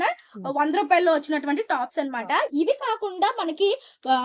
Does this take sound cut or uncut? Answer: uncut